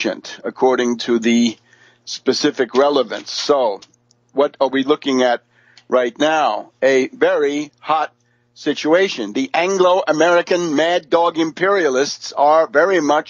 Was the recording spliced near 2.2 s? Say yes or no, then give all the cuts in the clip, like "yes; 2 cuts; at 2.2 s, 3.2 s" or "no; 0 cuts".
yes; 1 cut; at 2.2 s